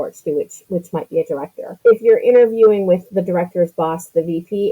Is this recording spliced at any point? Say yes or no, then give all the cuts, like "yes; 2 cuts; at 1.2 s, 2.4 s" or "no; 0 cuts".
yes; 2 cuts; at 1.7 s, 3.1 s